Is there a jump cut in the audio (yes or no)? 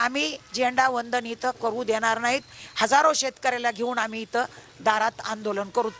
no